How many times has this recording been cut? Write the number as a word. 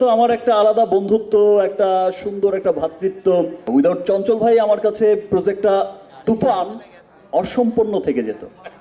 one